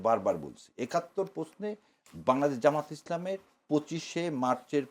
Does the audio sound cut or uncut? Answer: uncut